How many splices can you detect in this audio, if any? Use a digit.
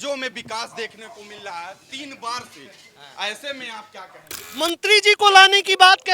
1